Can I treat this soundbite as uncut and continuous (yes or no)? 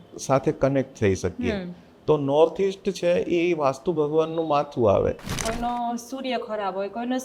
no